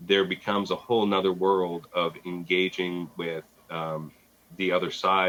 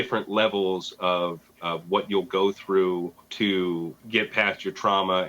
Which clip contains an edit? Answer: second; 2 cuts; at 3.2 s, 4.0 s

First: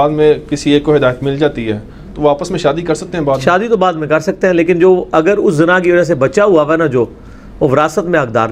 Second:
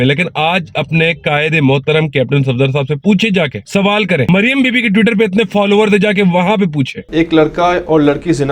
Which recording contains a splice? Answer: second; 1 cut; at 7.0 s

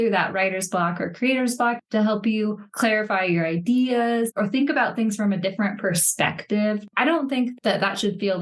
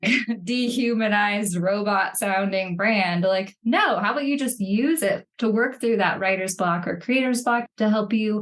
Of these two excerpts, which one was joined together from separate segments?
first; 2 cuts; at 4.3 s, 6.9 s

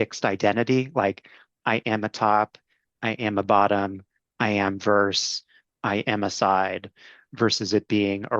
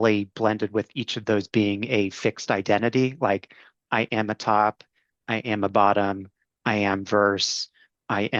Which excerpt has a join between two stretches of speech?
first; 1 cut; at 7.2 s

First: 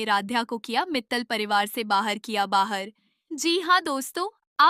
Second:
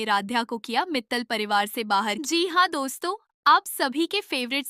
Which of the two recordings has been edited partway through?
second; 1 cut; at 2.2 s

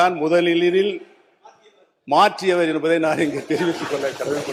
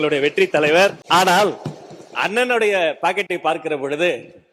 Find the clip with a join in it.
second; 1 cut; at 1.0 s

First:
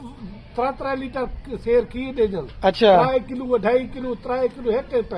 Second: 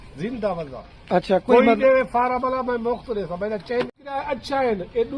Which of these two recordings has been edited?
second; 1 cut; at 4.1 s

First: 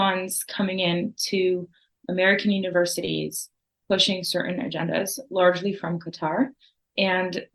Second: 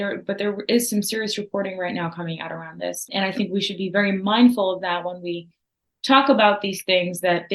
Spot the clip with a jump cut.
second; 1 cut; at 3.1 s

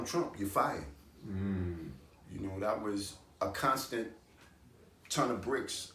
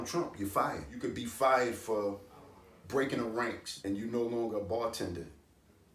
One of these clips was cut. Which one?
second; 2 cuts; at 0.9 s, 3.7 s

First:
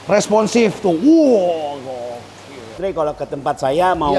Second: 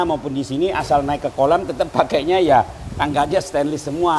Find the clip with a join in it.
first; 1 cut; at 2.8 s

